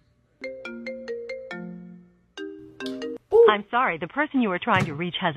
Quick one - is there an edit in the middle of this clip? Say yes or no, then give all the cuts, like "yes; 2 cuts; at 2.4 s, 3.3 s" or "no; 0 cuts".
no; 0 cuts